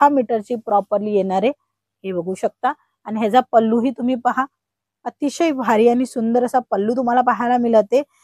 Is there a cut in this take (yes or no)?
no